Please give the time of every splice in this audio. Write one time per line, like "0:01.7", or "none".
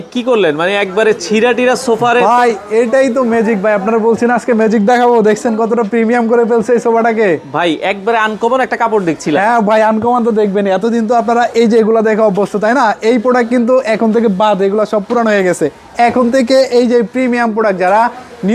none